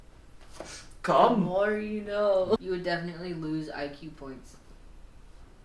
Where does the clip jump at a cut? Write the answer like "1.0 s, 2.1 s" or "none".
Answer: 2.6 s